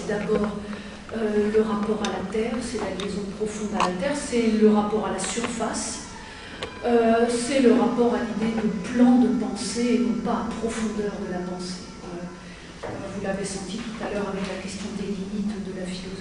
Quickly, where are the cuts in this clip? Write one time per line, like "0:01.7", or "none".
0:01.5